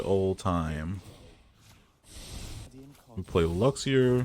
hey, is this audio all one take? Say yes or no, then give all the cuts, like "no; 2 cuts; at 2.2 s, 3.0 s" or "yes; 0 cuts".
no; 1 cut; at 2.7 s